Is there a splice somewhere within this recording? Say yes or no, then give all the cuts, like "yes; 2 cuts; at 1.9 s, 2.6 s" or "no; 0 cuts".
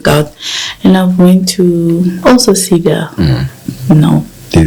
no; 0 cuts